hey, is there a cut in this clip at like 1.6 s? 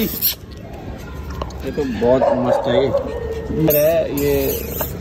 no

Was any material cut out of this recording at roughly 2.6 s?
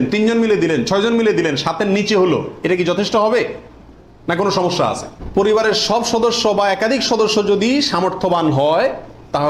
no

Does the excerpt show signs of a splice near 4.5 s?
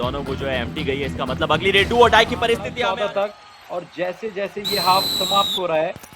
no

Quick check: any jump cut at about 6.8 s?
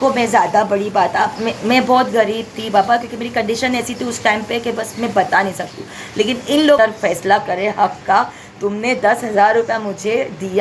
yes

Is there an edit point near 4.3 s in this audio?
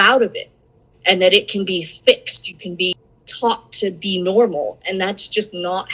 no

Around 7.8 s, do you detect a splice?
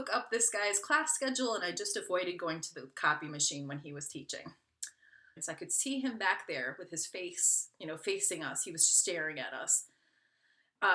no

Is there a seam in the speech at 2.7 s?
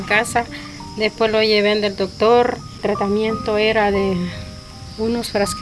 yes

